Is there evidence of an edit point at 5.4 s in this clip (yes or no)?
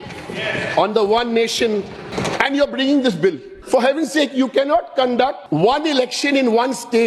yes